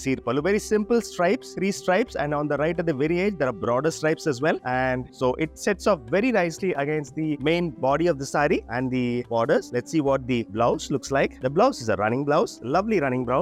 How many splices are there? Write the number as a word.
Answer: zero